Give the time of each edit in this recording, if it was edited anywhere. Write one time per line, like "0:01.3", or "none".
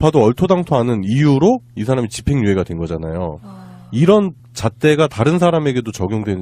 0:04.9

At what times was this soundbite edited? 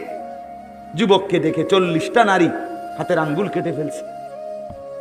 0:03.9

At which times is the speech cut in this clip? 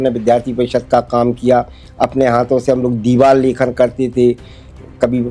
none

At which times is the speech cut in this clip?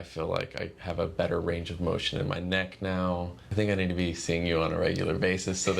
0:03.4

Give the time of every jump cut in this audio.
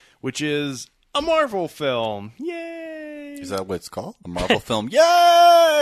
0:04.2

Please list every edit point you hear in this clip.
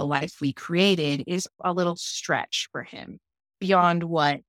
0:01.5

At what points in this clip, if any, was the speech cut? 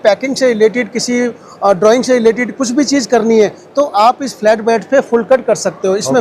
none

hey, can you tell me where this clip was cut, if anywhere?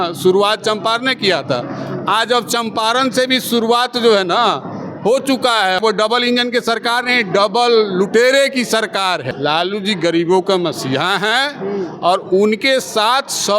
0:05.8
0:09.3

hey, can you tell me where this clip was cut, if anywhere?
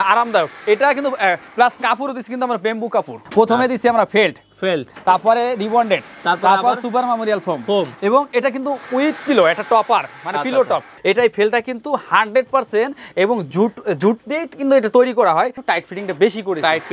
0:03.2
0:10.9
0:15.6

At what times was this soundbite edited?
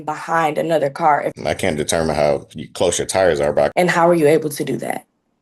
0:01.3
0:03.7

